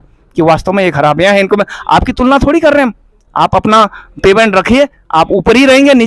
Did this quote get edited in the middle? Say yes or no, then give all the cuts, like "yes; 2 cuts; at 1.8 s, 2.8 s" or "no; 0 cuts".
no; 0 cuts